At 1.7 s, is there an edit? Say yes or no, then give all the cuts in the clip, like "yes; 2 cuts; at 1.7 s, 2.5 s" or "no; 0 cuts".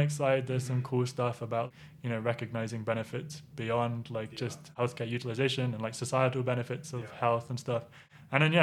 yes; 2 cuts; at 1.7 s, 4.7 s